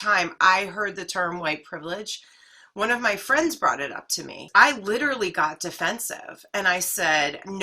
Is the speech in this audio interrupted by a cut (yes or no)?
yes